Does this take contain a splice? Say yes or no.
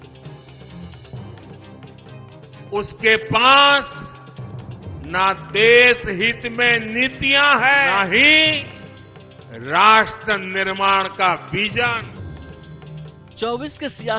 yes